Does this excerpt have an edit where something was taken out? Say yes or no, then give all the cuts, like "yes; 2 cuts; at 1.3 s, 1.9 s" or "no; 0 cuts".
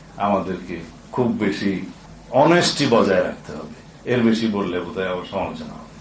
no; 0 cuts